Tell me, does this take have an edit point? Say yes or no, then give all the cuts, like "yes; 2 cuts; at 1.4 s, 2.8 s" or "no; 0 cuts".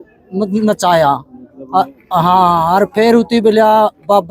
no; 0 cuts